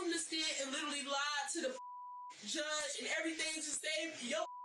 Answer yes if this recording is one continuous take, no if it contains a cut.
yes